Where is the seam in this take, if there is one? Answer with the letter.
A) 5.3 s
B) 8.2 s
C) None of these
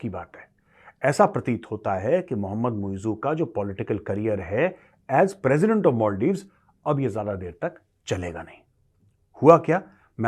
C